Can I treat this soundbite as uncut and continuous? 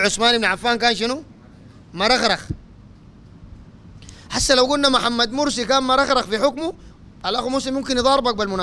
yes; 0 cuts

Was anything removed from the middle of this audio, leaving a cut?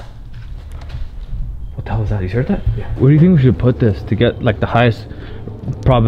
yes; 1 cut; at 2.9 s

